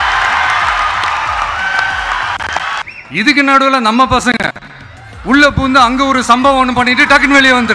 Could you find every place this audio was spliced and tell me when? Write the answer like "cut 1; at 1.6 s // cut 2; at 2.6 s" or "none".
cut 1; at 2.8 s